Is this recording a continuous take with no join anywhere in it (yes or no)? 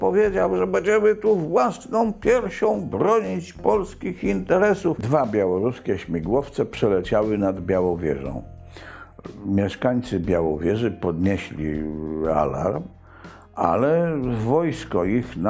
no